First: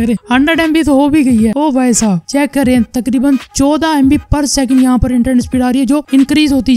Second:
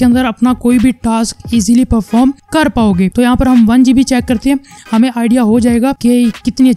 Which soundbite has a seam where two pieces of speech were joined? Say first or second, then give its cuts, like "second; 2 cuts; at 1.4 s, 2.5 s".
second; 1 cut; at 3.1 s